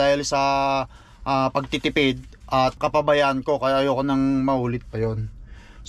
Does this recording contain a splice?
yes; 1 cut; at 2.8 s

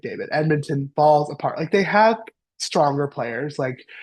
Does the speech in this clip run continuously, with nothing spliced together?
yes; 0 cuts

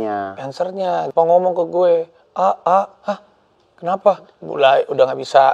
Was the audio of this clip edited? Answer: yes; 2 cuts; at 1.1 s, 4.4 s

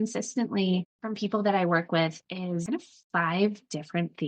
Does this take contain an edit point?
yes; 2 cuts; at 1.0 s, 2.6 s

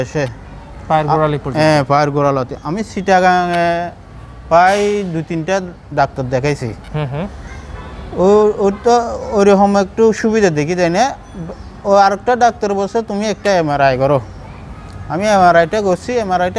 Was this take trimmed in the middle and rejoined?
no; 0 cuts

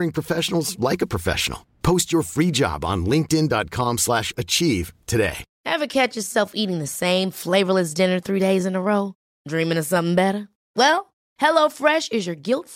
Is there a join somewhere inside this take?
yes; 1 cut; at 5.5 s

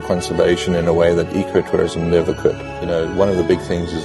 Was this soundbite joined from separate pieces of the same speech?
no; 0 cuts

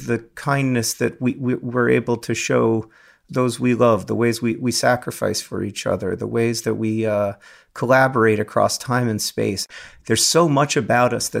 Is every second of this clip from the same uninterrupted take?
no; 2 cuts; at 3.2 s, 9.7 s

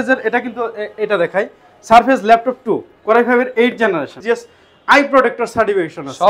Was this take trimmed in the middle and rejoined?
yes; 1 cut; at 4.2 s

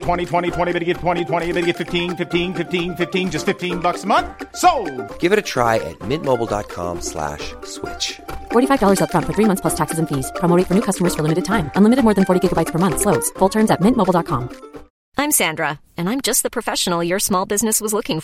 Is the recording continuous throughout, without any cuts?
no; 1 cut; at 14.9 s

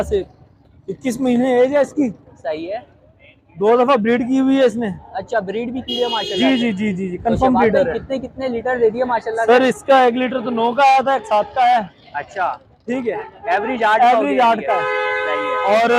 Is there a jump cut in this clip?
no; 0 cuts

